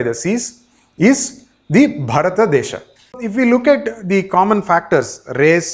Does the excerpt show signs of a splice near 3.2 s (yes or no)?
yes